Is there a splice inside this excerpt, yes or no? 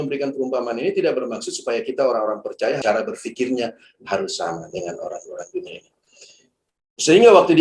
no